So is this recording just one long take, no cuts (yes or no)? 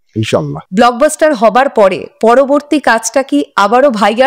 yes